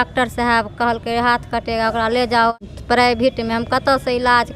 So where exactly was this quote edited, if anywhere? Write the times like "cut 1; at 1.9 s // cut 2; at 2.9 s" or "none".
cut 1; at 2.5 s